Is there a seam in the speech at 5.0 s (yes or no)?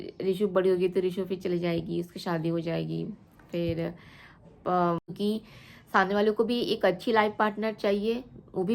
yes